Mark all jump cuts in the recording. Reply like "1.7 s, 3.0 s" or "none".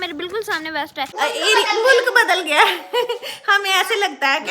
1.1 s